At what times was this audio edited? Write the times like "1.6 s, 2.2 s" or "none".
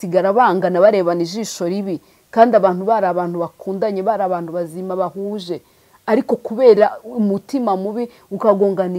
none